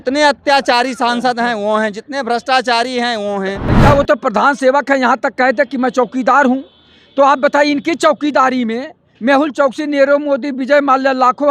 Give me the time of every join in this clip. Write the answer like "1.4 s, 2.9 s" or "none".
3.7 s